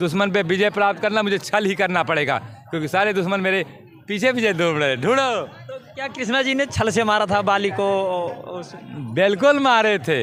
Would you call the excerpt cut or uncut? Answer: uncut